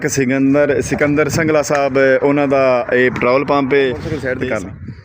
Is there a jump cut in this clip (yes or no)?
yes